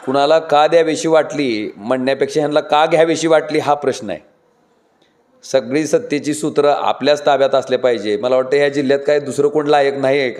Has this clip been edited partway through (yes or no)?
no